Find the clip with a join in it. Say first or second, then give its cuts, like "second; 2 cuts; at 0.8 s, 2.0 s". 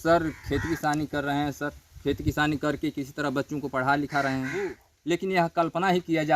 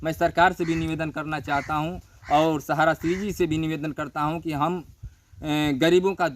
first; 1 cut; at 4.9 s